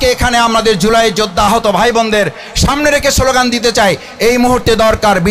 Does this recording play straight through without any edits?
yes; 0 cuts

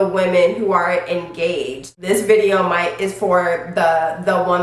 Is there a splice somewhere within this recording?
yes; 1 cut; at 1.9 s

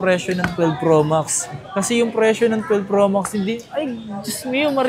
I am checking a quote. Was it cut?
no; 0 cuts

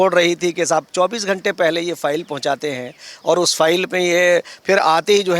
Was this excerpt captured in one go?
yes; 0 cuts

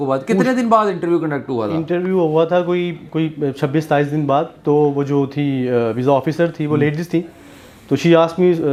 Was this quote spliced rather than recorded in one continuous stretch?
no; 0 cuts

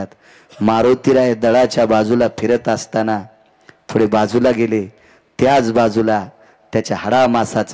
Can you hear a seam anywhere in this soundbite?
no; 0 cuts

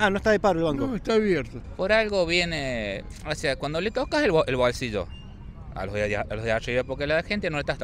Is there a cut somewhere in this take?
yes; 1 cut; at 1.6 s

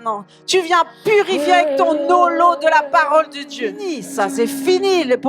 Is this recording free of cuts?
no; 1 cut; at 4.0 s

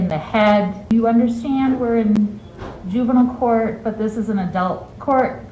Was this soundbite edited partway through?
yes; 1 cut; at 0.9 s

